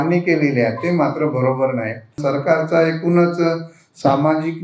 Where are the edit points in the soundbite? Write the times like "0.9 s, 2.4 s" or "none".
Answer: 2.2 s